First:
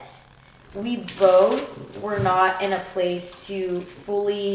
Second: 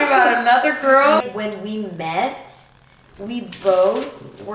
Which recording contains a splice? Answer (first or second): second